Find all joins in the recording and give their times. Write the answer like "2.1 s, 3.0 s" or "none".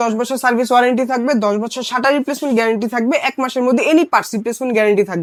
none